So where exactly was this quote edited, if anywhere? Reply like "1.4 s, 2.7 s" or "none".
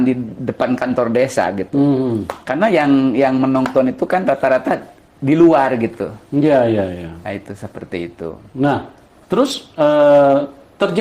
none